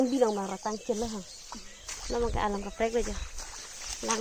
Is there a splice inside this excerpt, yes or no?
no